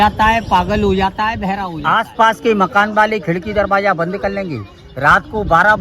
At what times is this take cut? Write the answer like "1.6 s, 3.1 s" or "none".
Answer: 1.7 s